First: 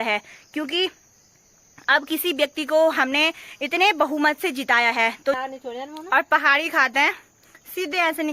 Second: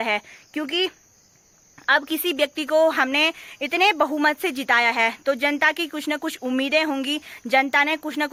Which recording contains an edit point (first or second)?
first